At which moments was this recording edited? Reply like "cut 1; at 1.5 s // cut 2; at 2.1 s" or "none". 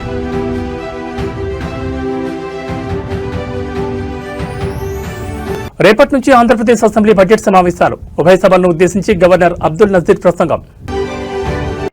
cut 1; at 5.3 s